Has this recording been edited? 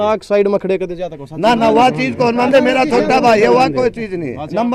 no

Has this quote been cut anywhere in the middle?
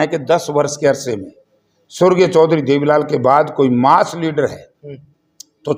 no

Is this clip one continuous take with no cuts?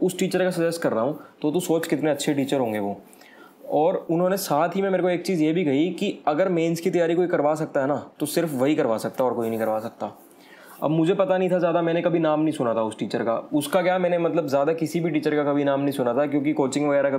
yes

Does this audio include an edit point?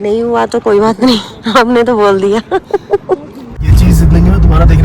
yes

